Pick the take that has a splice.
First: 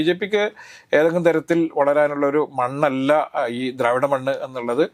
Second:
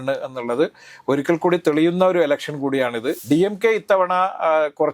second; 1 cut; at 3.2 s

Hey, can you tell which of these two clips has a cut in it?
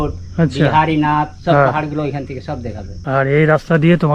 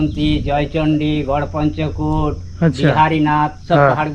first; 1 cut; at 2.9 s

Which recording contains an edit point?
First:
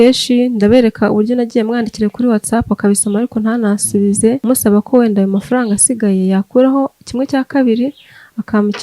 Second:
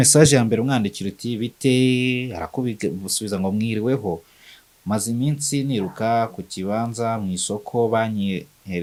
first; 1 cut; at 4.4 s

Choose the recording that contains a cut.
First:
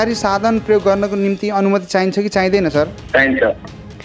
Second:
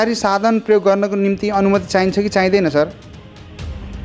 first; 1 cut; at 3.0 s

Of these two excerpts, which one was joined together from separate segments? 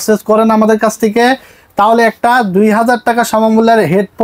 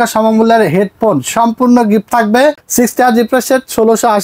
second; 1 cut; at 2.6 s

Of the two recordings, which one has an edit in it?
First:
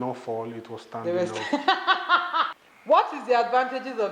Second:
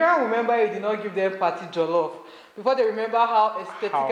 first; 1 cut; at 2.5 s

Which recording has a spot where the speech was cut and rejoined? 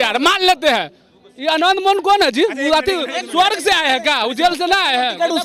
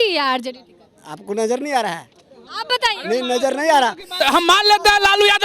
second; 1 cut; at 4.2 s

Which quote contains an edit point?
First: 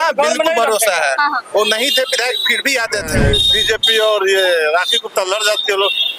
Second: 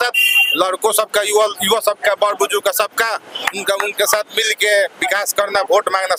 first; 1 cut; at 3.2 s

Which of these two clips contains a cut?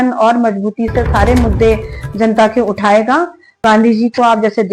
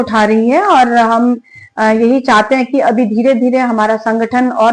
first; 1 cut; at 3.6 s

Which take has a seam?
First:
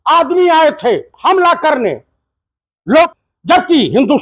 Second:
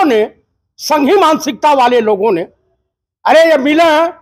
first; 1 cut; at 3.1 s

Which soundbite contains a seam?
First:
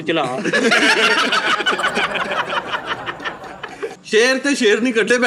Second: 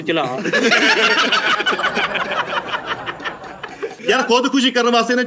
first; 1 cut; at 4.0 s

